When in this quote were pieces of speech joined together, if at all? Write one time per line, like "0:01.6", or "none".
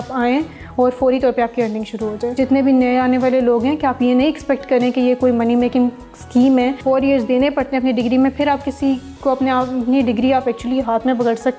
0:02.3
0:06.8